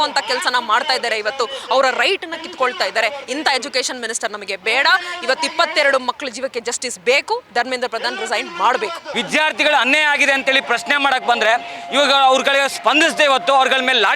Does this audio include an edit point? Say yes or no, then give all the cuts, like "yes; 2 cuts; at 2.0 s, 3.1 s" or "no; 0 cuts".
yes; 1 cut; at 9.1 s